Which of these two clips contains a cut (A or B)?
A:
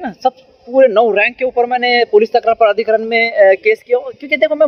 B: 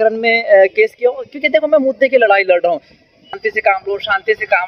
B